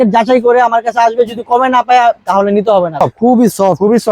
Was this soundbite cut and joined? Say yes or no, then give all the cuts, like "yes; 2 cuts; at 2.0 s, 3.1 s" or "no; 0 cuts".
yes; 1 cut; at 3.0 s